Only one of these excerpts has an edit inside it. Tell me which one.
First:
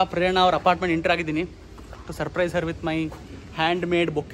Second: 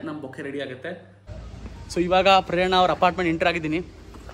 second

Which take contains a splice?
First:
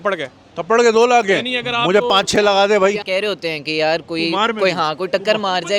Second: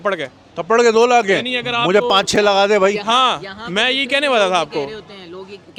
first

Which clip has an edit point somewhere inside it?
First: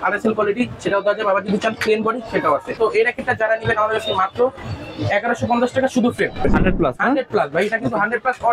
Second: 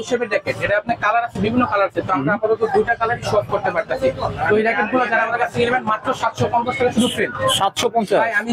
first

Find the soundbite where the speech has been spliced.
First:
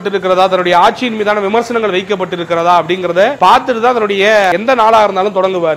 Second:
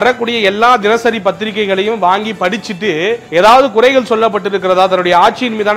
first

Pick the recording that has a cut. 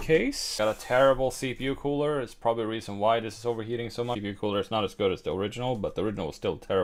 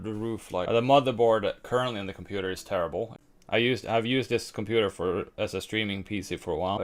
second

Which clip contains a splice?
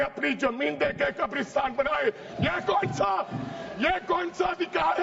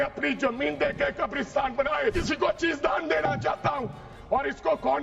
second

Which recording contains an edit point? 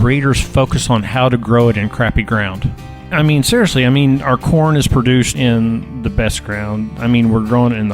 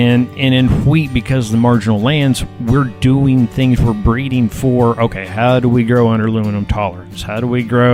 first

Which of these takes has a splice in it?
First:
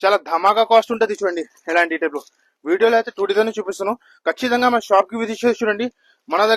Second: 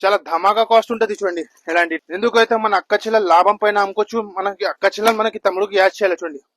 second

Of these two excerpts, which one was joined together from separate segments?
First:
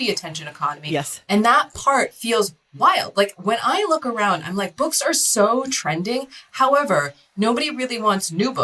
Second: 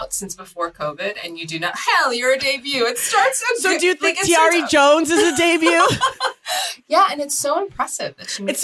first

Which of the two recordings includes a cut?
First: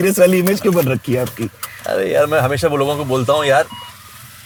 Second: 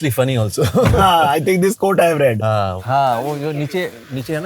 second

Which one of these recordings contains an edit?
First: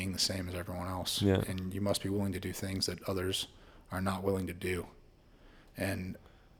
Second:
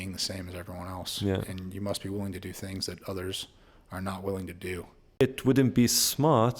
second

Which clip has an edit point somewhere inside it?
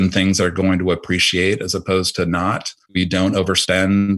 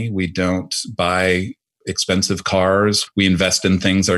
first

